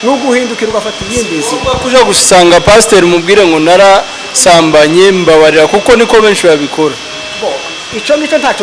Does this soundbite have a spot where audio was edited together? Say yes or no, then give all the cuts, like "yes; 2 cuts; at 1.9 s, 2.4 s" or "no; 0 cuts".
no; 0 cuts